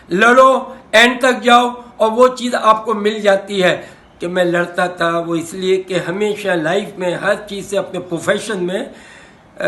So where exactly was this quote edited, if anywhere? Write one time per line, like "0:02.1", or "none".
0:03.9